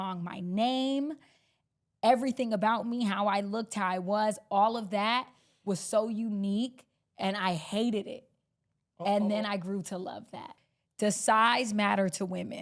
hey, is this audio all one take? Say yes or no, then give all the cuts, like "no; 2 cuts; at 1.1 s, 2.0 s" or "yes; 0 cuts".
no; 1 cut; at 10.6 s